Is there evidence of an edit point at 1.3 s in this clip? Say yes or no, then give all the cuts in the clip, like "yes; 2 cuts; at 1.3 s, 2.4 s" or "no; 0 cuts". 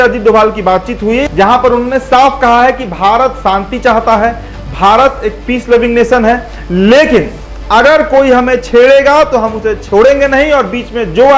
yes; 1 cut; at 1.3 s